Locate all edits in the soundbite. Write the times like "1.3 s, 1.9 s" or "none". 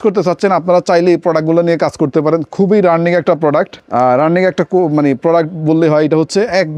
none